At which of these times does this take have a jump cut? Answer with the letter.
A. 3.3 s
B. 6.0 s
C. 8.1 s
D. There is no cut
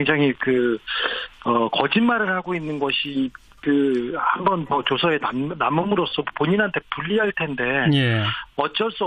D